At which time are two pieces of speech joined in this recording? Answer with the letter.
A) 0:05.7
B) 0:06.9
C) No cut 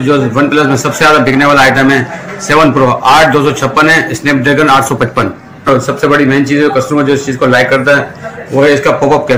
A